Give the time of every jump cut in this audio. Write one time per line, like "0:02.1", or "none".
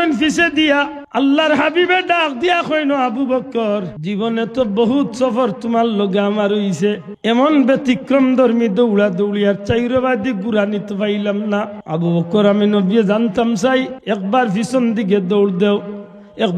0:01.0
0:03.9
0:07.1
0:11.8
0:14.0